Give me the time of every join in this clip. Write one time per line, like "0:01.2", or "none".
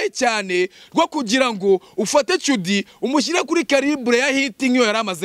none